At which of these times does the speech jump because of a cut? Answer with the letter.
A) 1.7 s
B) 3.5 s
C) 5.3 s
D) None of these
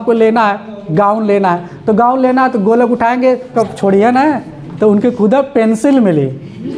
B